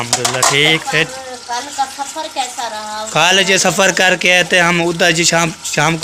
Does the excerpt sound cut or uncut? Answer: uncut